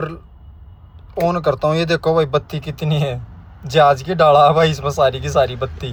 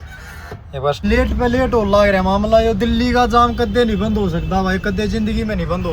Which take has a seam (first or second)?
second